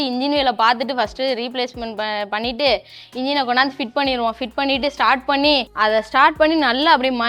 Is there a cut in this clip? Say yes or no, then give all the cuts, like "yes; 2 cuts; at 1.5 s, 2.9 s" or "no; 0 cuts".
yes; 1 cut; at 5.7 s